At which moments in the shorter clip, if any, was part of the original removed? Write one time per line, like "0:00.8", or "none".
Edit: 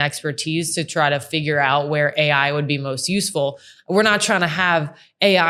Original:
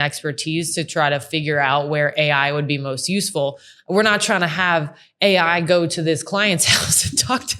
none